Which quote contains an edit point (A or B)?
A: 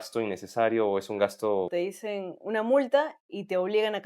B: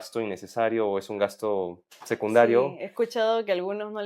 A